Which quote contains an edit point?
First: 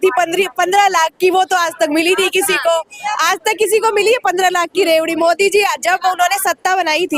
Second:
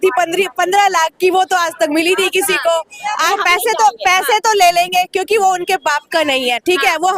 second; 1 cut; at 3.3 s

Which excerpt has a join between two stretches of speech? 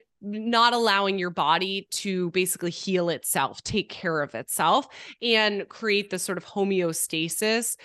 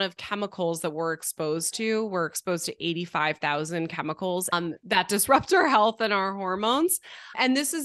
second; 1 cut; at 4.5 s

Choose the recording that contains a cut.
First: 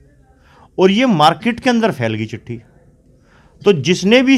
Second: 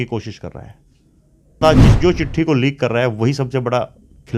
second; 1 cut; at 1.6 s

